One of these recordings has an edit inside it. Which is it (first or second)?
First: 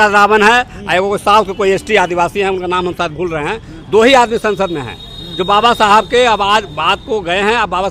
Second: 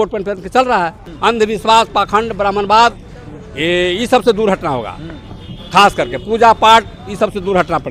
second